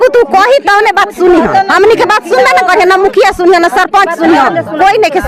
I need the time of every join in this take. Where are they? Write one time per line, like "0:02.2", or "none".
none